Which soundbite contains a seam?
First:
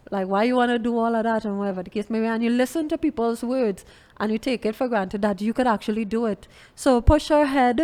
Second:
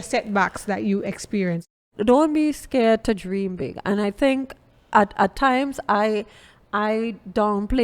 second; 1 cut; at 1.8 s

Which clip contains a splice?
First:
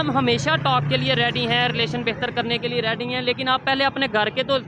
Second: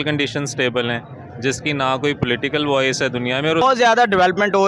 second; 1 cut; at 3.6 s

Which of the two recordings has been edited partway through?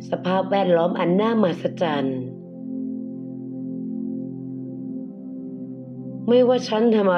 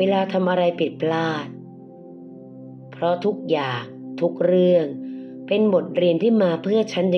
first; 2 cuts; at 2.0 s, 6.2 s

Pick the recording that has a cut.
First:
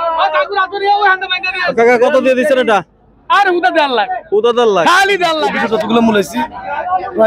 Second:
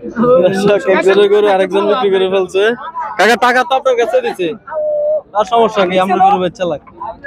first; 1 cut; at 5.4 s

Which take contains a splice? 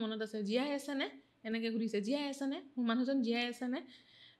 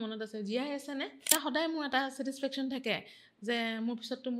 second; 1 cut; at 1.3 s

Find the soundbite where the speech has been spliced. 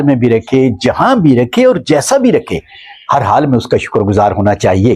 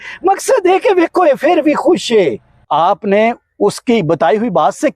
second; 1 cut; at 2.5 s

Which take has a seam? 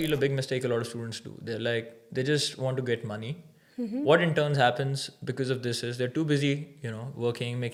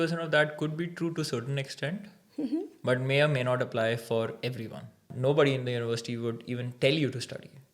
second; 1 cut; at 5.1 s

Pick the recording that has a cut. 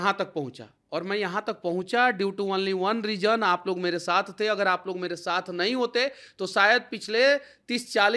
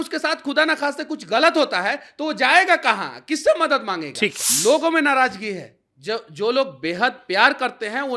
second; 1 cut; at 4.4 s

